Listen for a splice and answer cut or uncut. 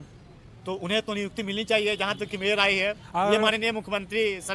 uncut